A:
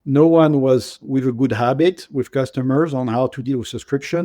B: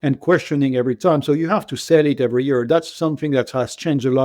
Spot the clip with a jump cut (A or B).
A